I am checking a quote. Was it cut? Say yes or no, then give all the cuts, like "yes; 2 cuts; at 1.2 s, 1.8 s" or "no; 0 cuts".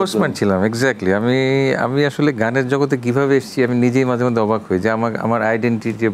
no; 0 cuts